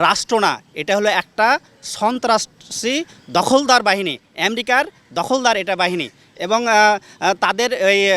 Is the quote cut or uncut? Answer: uncut